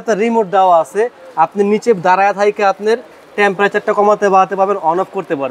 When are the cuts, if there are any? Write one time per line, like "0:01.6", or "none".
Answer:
none

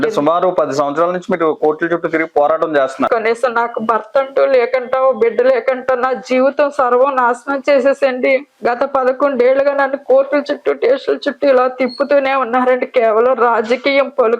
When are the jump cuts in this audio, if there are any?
0:03.1
0:08.5

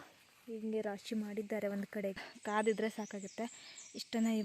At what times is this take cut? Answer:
0:02.6

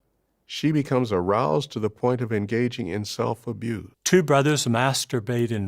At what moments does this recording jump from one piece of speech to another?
0:03.9

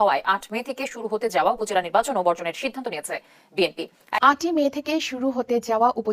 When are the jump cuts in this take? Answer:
0:04.2

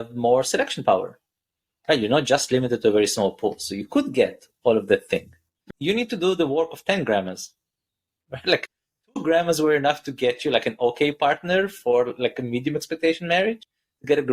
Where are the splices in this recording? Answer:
0:05.7

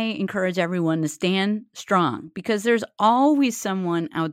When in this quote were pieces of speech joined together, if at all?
none

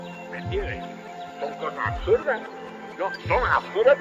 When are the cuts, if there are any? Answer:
none

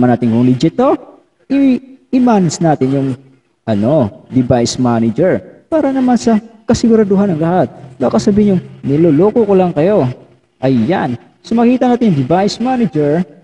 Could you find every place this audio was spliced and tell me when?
none

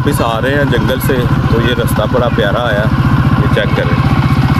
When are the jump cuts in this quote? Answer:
none

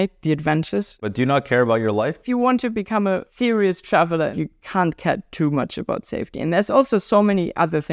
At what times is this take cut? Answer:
0:00.9
0:02.2
0:03.3
0:04.3

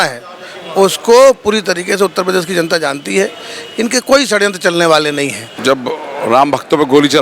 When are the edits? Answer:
0:05.5

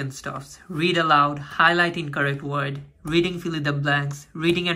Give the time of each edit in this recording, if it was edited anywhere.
none

